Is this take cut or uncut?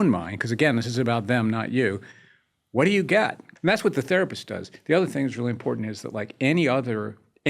cut